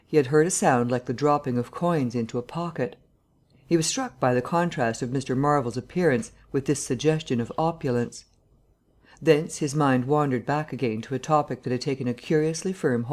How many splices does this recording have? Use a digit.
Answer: 1